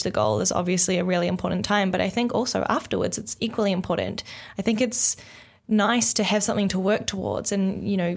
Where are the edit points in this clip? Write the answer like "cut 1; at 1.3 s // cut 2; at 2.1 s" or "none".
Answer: none

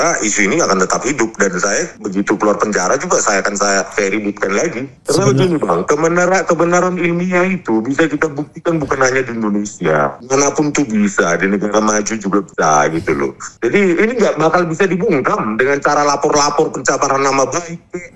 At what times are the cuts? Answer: cut 1; at 2.0 s // cut 2; at 3.9 s // cut 3; at 4.9 s // cut 4; at 10.2 s // cut 5; at 12.5 s // cut 6; at 13.4 s

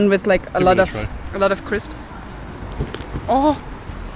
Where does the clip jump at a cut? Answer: none

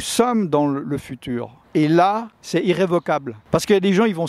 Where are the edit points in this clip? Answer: cut 1; at 1.6 s // cut 2; at 3.3 s

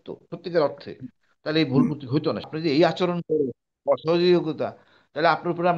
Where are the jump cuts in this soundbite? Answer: cut 1; at 2.4 s

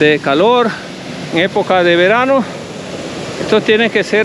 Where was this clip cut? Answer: none

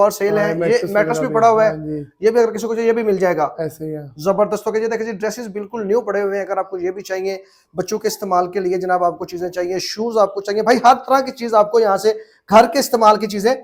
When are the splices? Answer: none

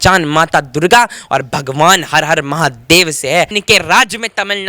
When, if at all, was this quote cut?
cut 1; at 3.6 s

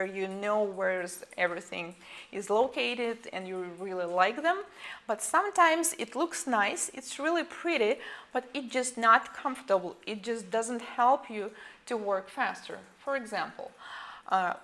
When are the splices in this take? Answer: none

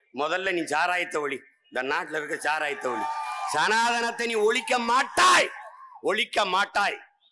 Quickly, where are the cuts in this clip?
none

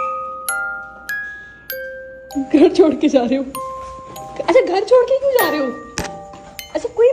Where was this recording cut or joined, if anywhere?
cut 1; at 2.3 s

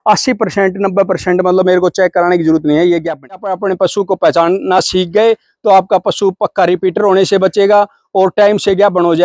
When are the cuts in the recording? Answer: cut 1; at 3.5 s

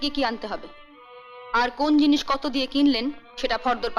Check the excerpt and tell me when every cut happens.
none

